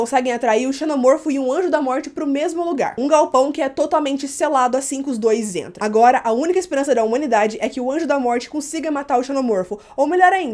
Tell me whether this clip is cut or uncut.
cut